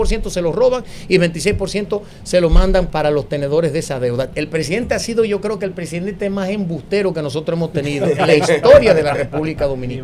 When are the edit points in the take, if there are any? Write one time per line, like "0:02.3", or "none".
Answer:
0:02.9
0:04.3